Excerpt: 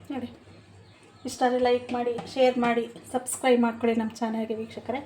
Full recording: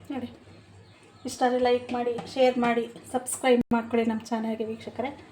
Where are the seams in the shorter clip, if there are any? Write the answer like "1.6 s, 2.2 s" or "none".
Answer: 3.6 s